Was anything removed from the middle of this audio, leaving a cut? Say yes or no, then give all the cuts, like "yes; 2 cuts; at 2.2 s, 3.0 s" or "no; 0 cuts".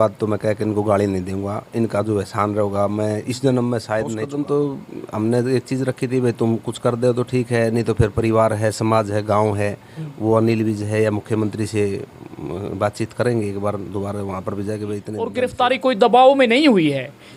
yes; 2 cuts; at 4.2 s, 15.3 s